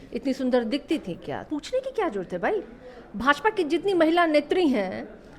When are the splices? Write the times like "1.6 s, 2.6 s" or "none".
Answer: 1.4 s